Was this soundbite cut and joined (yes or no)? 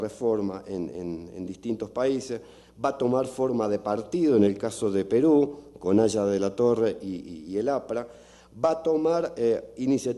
no